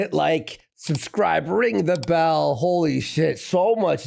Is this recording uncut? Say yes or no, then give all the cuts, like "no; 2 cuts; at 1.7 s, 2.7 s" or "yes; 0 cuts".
yes; 0 cuts